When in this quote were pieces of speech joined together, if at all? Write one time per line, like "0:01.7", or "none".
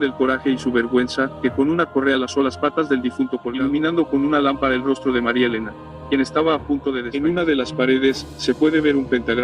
0:03.4
0:07.0